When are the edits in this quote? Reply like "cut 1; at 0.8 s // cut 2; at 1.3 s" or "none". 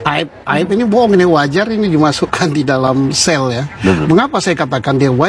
cut 1; at 3.7 s